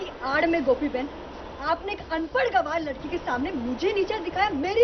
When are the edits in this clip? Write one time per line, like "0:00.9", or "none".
none

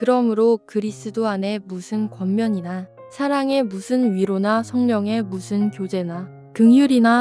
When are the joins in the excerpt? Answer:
none

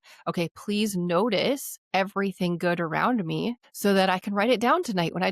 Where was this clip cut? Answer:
0:01.7
0:03.7

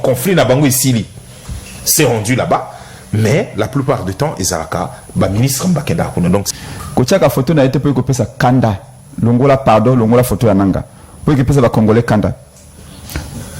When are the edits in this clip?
0:06.5

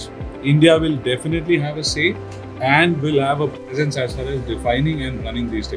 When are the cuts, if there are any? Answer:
none

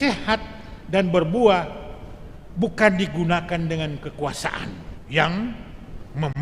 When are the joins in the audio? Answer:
0:04.9

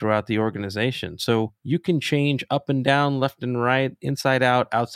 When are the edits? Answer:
0:01.6

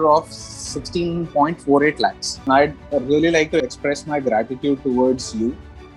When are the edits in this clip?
0:02.5
0:03.6

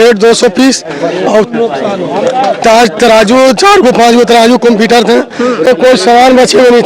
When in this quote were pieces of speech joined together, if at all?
0:05.6

